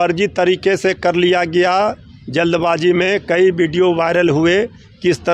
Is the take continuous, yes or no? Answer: yes